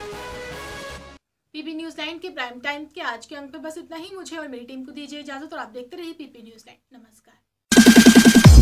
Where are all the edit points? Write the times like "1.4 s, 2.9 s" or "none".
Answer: none